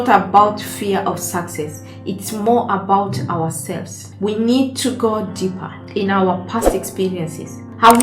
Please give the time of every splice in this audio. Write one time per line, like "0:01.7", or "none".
none